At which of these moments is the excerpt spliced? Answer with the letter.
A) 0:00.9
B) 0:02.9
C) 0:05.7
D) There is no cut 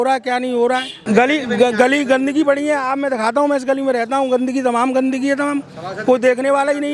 A